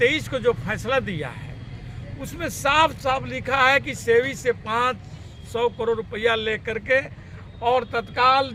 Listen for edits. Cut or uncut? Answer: uncut